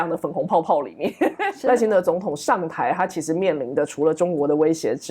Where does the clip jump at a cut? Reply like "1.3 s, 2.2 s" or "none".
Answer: 1.5 s